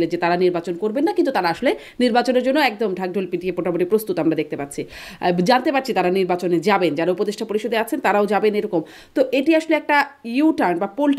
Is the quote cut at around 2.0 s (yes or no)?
no